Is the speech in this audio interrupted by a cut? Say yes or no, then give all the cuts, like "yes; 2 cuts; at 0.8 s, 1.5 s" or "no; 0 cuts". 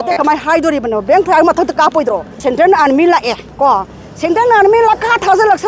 yes; 1 cut; at 2.4 s